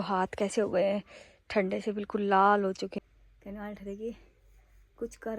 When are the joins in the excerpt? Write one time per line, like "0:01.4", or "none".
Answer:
0:02.9

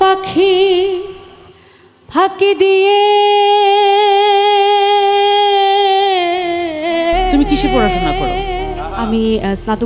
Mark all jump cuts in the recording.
0:08.9

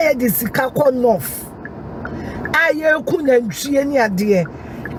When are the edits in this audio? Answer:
none

